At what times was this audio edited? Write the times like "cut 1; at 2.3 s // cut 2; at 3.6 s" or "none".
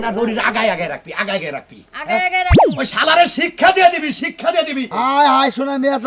cut 1; at 4.9 s